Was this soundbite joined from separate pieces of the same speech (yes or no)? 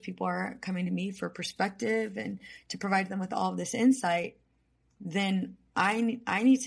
no